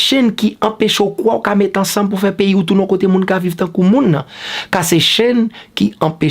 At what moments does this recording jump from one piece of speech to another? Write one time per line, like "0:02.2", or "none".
none